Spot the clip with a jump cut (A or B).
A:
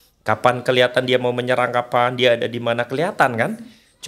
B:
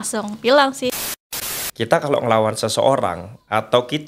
B